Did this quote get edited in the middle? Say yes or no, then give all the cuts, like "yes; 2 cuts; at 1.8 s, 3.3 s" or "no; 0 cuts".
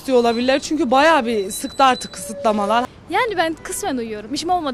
yes; 1 cut; at 2.8 s